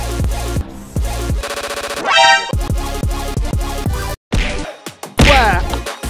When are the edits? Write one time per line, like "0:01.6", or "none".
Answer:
none